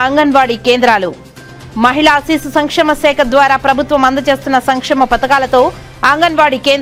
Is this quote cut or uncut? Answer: uncut